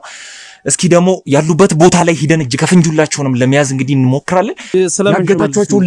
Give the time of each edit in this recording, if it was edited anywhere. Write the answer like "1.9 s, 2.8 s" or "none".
4.6 s